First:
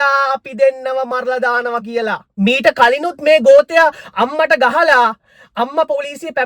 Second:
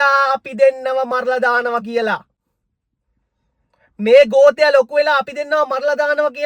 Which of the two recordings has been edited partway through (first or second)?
first